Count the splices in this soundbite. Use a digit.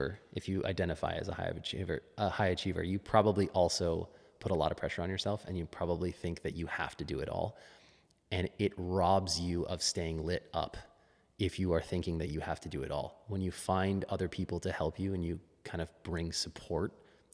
0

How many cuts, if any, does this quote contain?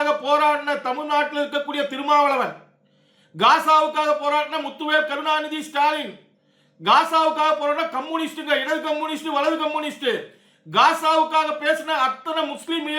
0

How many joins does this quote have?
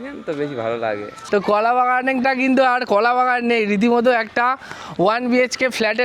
1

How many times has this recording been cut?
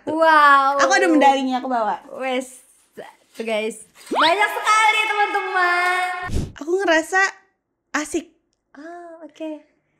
1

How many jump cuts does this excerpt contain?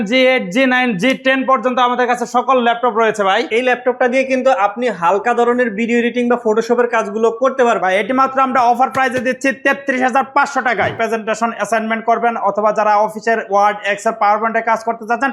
3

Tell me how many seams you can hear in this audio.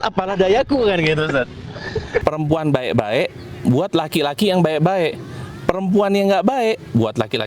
1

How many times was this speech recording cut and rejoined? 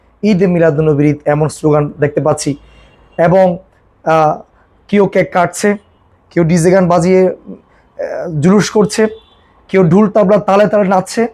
0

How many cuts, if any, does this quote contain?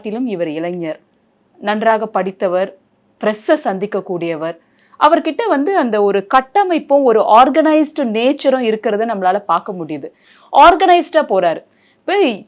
1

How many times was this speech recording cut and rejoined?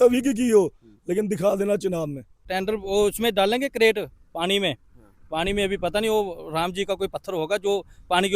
1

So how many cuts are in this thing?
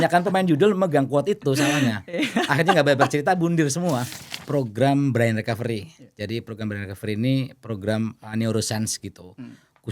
1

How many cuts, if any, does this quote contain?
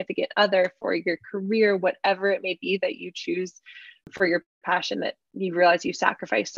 1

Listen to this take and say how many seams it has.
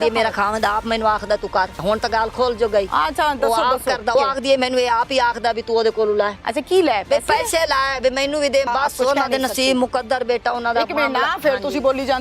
4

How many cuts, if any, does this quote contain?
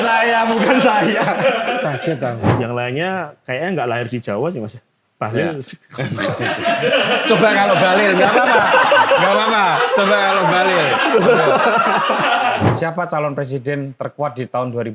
2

